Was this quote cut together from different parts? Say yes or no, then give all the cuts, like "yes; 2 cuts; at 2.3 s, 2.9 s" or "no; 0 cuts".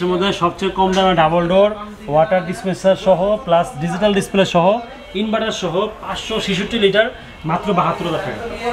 no; 0 cuts